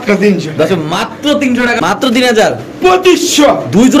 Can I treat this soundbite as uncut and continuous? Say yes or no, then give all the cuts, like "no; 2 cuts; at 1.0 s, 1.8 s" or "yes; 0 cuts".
no; 1 cut; at 1.8 s